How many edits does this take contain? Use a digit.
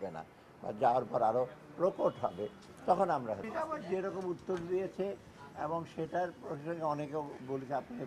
1